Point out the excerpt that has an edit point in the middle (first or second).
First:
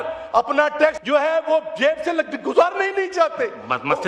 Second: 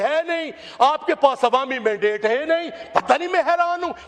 first